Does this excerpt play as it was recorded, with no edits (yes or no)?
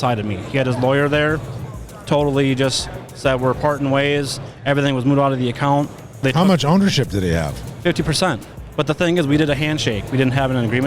no